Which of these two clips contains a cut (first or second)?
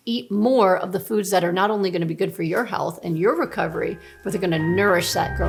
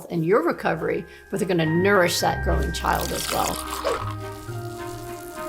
second